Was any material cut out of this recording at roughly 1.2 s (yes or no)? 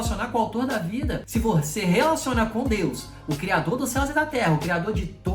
yes